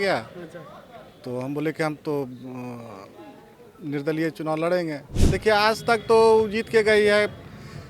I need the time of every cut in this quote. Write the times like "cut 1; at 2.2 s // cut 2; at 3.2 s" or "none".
cut 1; at 5.1 s